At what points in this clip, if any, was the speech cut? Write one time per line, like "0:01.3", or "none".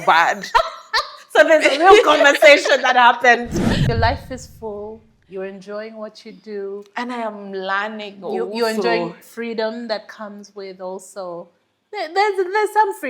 0:03.7